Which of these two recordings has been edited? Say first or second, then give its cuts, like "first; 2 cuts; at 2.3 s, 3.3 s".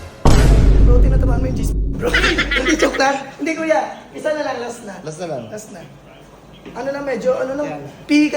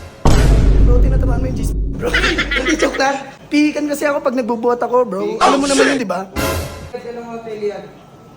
second; 2 cuts; at 3.3 s, 6.9 s